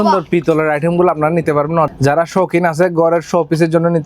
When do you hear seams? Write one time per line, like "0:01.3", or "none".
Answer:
0:01.9